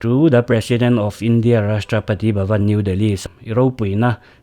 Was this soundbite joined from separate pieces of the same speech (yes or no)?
yes